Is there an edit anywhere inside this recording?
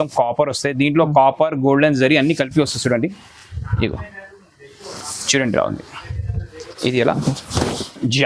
no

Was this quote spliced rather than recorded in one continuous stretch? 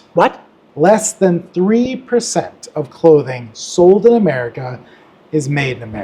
no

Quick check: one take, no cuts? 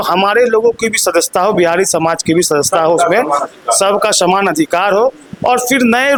yes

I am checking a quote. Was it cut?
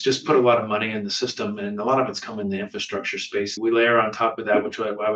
yes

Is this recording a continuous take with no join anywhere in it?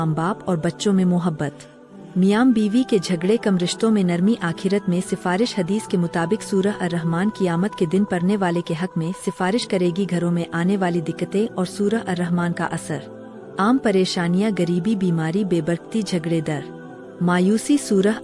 yes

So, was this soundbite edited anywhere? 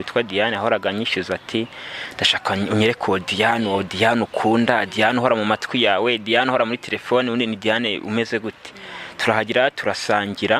no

